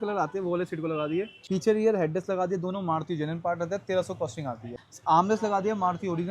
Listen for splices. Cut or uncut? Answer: cut